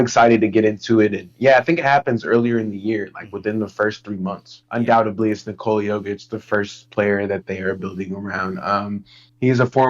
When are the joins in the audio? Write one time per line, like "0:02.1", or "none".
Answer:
0:04.5

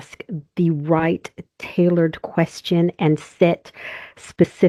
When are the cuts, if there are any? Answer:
none

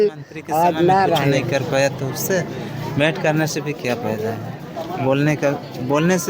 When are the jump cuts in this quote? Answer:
0:01.4

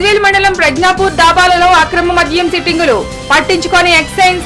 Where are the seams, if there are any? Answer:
none

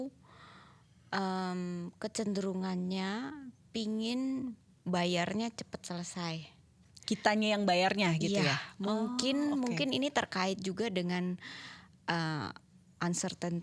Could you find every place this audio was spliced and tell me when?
none

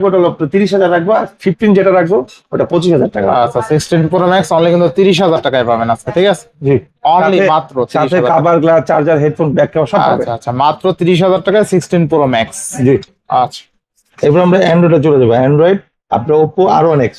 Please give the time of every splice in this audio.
none

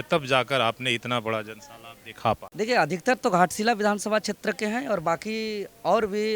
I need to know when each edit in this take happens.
0:02.5

